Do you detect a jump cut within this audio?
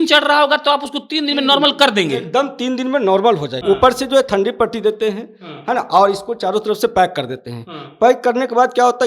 yes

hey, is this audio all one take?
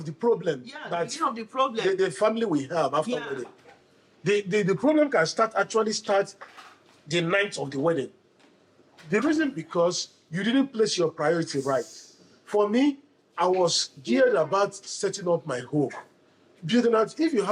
yes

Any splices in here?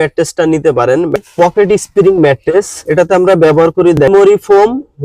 yes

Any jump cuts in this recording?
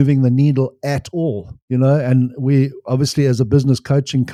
no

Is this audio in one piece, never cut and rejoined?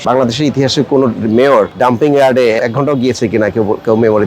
no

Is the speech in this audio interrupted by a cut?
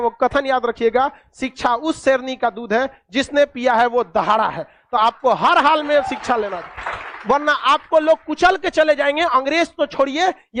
no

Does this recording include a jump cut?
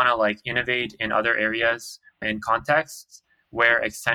yes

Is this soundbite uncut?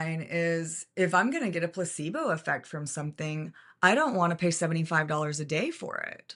yes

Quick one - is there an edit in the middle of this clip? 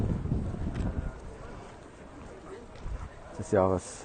no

